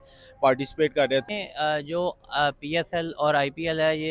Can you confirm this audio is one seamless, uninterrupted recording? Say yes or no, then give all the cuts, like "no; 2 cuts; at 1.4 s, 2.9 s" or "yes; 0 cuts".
yes; 0 cuts